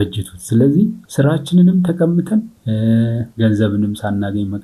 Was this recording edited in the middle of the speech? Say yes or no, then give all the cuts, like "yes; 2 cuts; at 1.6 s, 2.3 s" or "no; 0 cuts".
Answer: yes; 3 cuts; at 1.0 s, 2.6 s, 3.2 s